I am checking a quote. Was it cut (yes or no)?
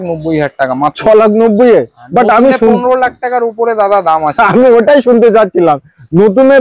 no